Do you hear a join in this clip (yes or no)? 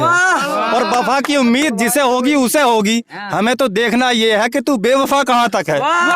no